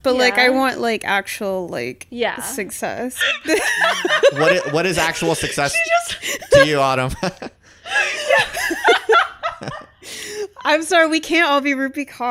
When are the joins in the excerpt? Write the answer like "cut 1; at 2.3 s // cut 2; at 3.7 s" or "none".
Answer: cut 1; at 3.2 s